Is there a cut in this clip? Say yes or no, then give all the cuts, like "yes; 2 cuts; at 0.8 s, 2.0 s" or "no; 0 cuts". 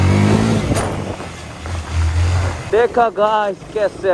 yes; 1 cut; at 2.6 s